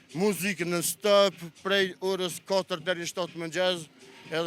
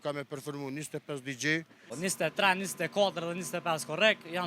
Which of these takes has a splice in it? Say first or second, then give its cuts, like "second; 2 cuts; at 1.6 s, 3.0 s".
second; 1 cut; at 1.9 s